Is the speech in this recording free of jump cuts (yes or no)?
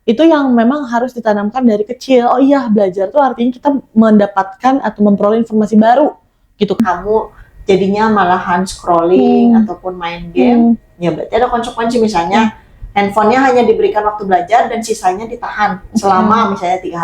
no